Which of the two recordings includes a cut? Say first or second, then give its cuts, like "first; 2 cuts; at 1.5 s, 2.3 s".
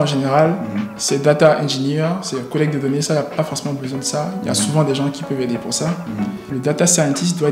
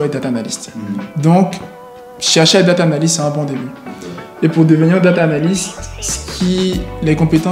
first; 1 cut; at 6.5 s